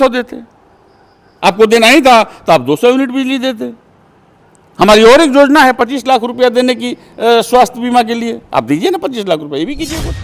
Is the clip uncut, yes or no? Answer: yes